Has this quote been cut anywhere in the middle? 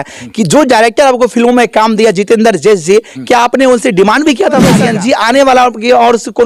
yes; 1 cut; at 4.8 s

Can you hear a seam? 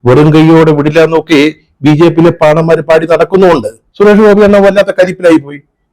yes; 1 cut; at 3.8 s

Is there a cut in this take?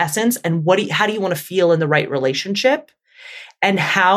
no; 0 cuts

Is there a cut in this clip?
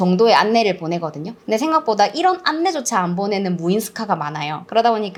no; 0 cuts

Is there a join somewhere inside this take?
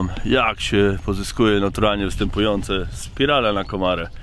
no; 0 cuts

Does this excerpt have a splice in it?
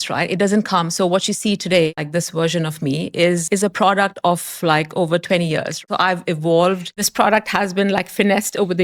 yes; 3 cuts; at 2.0 s, 5.7 s, 7.0 s

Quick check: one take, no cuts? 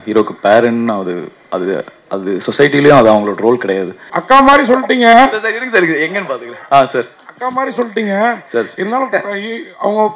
no; 1 cut; at 4.1 s

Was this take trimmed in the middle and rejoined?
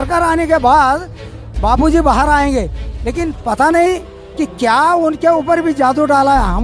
no; 0 cuts

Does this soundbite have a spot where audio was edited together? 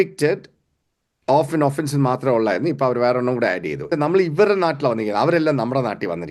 yes; 1 cut; at 3.8 s

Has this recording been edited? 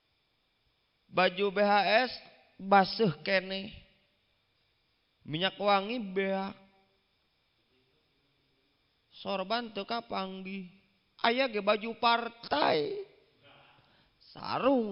no; 0 cuts

